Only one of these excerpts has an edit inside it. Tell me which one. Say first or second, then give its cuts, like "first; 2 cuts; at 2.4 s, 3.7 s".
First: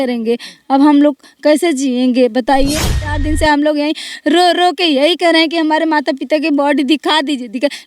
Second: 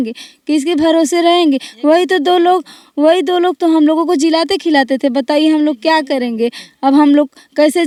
first; 1 cut; at 3.1 s